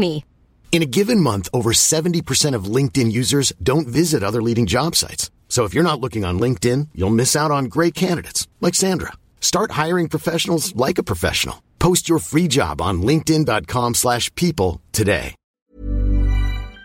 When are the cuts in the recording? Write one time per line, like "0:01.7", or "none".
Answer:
0:15.7